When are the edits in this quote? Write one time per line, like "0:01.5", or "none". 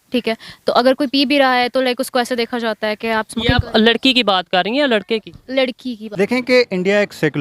0:06.0